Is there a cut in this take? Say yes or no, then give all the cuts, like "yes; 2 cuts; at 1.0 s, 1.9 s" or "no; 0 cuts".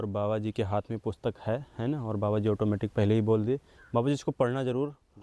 no; 0 cuts